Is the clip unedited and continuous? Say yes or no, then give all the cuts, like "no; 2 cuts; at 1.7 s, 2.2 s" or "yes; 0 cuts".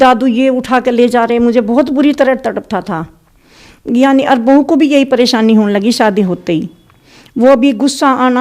yes; 0 cuts